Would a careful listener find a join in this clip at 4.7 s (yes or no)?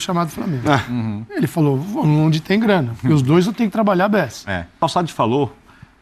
yes